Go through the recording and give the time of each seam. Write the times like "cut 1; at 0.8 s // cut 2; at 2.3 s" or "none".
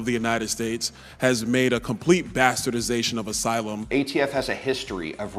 cut 1; at 3.8 s